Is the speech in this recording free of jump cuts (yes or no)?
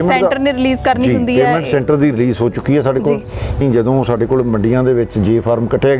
no